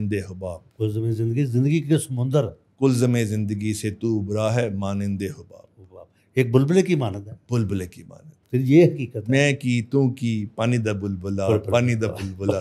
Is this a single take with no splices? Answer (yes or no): yes